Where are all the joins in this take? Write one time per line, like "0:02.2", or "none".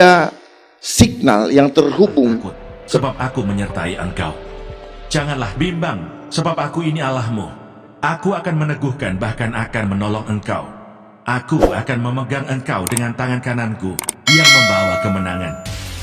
0:03.0